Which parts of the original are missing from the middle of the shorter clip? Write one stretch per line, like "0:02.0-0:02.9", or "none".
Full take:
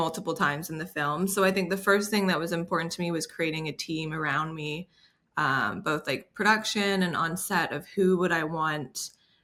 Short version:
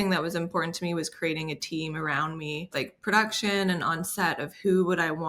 0:04.9-0:06.0